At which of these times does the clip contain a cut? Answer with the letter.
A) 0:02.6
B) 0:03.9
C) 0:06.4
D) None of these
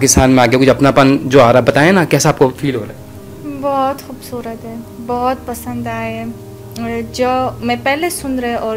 D